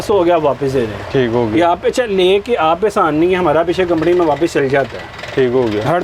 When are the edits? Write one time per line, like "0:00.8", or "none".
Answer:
none